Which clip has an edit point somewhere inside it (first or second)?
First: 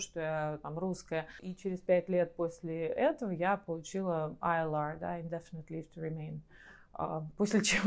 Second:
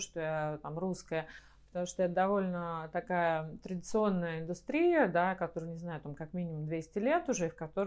first